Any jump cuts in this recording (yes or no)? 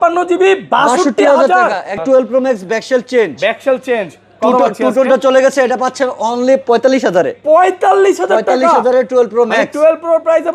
yes